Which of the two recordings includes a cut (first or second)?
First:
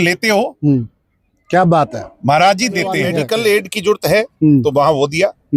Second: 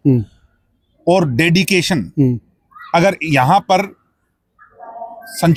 first